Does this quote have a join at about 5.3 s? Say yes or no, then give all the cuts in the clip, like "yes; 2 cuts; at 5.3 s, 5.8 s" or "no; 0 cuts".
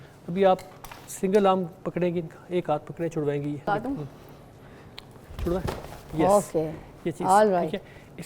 no; 1 cut; at 3.6 s